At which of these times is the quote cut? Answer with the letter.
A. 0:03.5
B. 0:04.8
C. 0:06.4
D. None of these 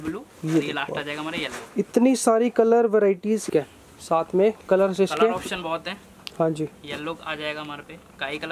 A